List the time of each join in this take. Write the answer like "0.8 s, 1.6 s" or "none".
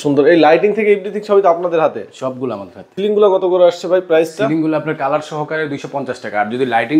2.9 s